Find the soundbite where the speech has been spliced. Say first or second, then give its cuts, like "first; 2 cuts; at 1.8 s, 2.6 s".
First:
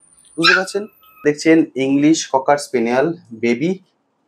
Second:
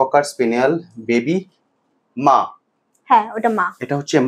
first; 1 cut; at 1.2 s